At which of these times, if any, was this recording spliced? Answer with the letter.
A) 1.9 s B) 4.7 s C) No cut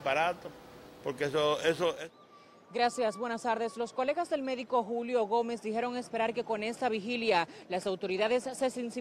A